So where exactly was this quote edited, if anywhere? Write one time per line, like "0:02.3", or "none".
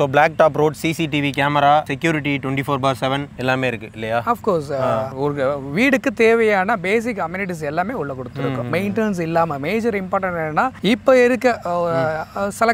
none